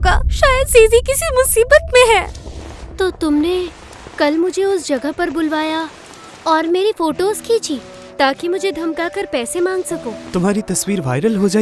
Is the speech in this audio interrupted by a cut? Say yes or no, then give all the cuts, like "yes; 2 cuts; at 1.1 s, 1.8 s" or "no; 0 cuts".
yes; 1 cut; at 10.2 s